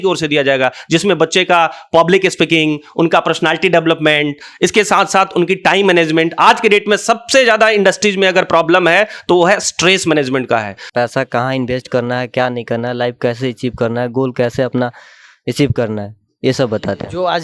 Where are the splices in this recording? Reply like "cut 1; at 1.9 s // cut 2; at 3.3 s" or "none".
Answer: cut 1; at 10.8 s